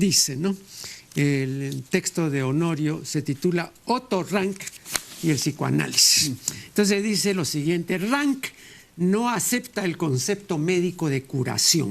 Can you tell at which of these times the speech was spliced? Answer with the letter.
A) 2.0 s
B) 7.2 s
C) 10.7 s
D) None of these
B